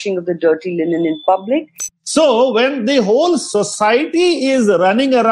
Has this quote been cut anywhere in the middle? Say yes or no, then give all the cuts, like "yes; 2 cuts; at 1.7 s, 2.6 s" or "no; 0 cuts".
yes; 1 cut; at 2.0 s